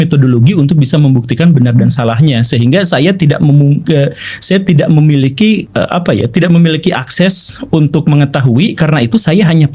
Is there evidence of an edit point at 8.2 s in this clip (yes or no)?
no